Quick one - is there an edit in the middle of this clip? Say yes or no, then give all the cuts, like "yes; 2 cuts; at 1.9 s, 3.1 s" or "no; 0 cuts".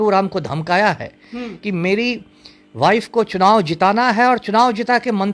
no; 0 cuts